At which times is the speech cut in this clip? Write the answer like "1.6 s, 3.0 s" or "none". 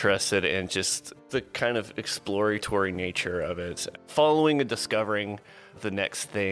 1.1 s, 4.0 s